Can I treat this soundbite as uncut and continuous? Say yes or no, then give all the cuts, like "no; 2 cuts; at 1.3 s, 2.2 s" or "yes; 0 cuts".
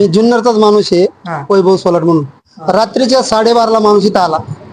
yes; 0 cuts